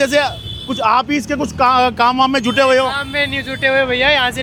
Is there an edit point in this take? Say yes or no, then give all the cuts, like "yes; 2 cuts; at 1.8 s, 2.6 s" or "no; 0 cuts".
no; 0 cuts